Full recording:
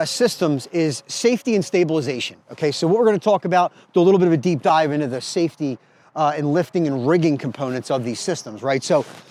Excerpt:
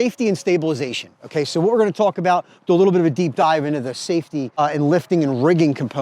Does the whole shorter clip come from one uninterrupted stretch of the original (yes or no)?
no